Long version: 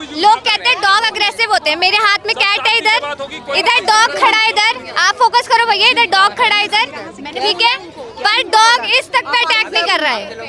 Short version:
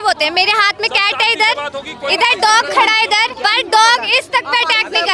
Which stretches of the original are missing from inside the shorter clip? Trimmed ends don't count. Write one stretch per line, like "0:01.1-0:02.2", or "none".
0:04.8-0:08.1